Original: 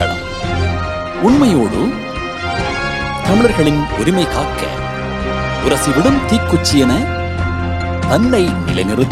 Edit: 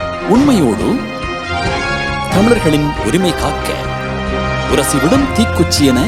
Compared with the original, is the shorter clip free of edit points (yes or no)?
yes